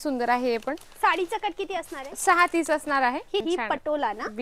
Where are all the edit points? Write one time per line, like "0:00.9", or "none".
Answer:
0:03.4